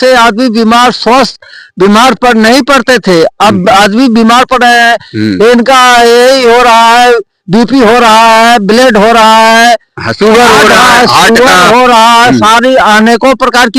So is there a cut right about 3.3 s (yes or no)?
no